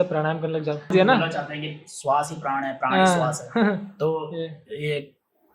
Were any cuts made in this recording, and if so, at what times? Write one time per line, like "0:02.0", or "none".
0:00.9